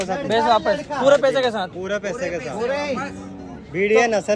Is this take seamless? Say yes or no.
yes